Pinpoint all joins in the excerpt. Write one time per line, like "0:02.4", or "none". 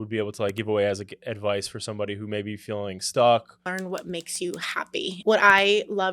0:03.7
0:05.1